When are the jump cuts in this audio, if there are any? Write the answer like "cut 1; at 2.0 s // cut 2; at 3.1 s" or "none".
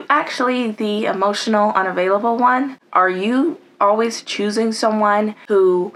none